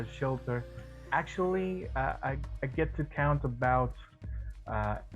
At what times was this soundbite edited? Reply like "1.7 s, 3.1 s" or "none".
1.0 s